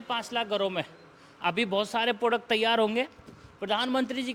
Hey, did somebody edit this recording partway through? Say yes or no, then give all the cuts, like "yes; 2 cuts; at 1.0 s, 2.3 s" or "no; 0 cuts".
no; 0 cuts